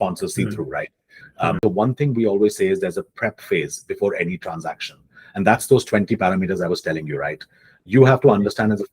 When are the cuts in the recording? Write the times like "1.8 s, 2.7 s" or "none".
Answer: 1.6 s